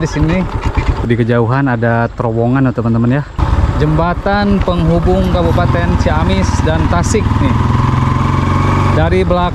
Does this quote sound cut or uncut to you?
cut